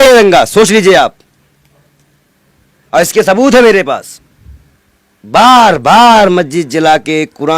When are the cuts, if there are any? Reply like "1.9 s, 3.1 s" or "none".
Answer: none